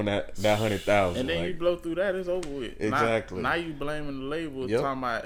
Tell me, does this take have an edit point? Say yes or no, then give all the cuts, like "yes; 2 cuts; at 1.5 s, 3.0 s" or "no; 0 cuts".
no; 0 cuts